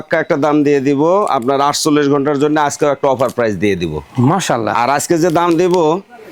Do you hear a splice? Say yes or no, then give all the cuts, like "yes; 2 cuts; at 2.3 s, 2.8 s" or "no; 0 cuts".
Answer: no; 0 cuts